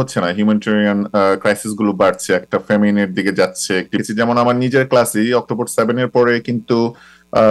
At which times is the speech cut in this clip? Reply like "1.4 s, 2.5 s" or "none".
4.0 s